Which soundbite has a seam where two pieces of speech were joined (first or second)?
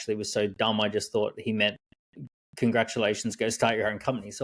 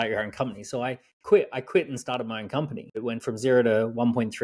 second